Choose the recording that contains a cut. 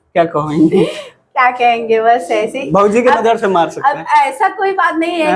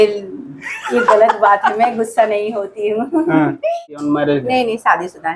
second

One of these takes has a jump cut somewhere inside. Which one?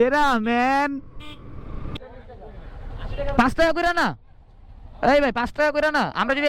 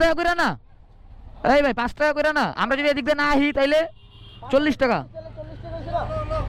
first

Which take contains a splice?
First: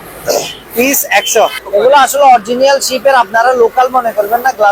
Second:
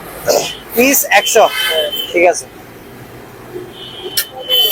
first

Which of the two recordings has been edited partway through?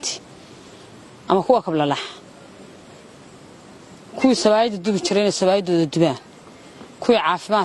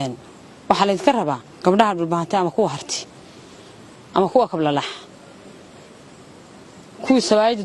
second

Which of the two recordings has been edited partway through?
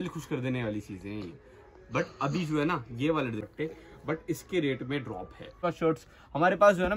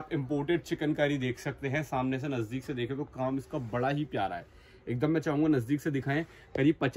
first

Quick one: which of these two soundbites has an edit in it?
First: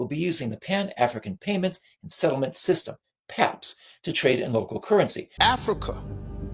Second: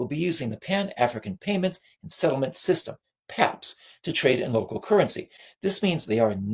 first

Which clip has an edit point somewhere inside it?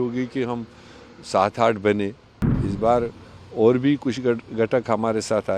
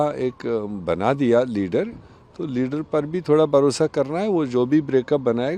first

